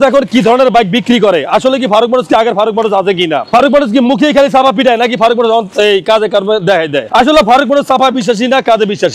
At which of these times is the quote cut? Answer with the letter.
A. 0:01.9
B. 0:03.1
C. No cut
C